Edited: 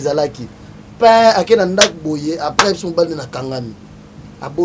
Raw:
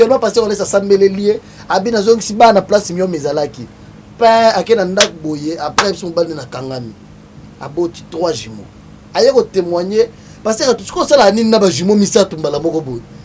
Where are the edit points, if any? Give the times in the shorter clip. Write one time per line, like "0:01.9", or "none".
none